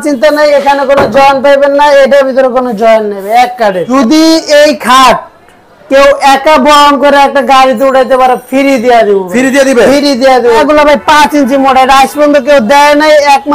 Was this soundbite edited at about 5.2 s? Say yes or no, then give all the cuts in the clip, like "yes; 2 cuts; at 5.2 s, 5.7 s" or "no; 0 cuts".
no; 2 cuts; at 3.8 s, 10.6 s